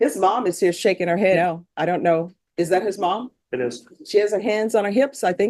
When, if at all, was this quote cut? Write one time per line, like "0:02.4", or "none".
0:01.4